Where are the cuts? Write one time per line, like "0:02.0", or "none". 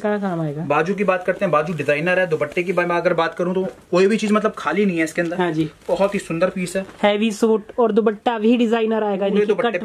none